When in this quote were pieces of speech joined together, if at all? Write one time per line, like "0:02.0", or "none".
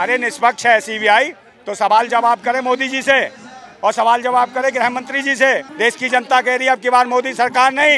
0:05.7